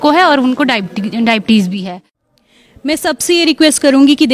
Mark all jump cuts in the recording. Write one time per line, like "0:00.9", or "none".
0:01.8